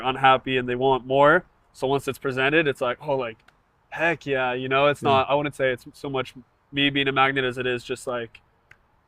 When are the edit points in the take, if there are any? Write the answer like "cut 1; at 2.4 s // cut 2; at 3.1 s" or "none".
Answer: none